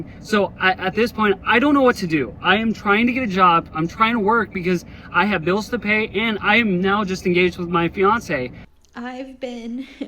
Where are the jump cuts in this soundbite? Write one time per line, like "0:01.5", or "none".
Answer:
0:08.6

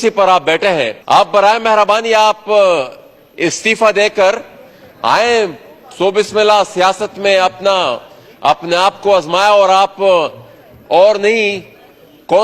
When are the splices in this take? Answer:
0:01.0

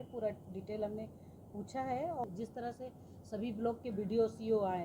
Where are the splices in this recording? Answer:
0:02.2

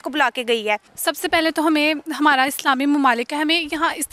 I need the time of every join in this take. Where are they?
0:00.9

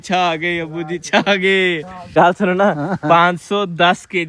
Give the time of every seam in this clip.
0:02.0

